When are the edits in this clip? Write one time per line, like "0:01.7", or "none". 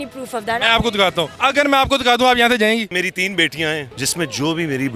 0:01.3
0:02.9
0:04.0